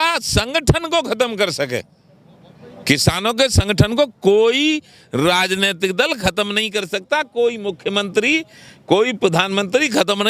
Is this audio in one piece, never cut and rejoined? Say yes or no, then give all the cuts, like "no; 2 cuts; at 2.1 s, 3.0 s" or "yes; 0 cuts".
yes; 0 cuts